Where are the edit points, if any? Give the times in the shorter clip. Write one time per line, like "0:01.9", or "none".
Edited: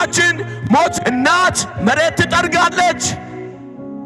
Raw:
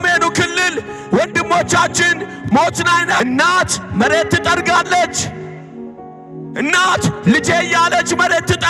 0:01.0